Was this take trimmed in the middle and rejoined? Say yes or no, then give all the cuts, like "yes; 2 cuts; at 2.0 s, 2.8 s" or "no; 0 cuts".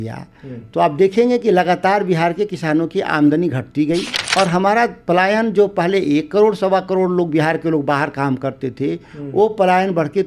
yes; 1 cut; at 4.2 s